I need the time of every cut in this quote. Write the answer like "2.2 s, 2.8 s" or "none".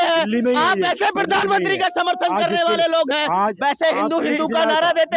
none